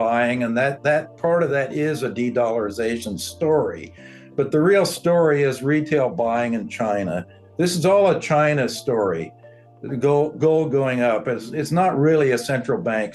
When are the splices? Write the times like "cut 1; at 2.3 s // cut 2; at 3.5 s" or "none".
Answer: none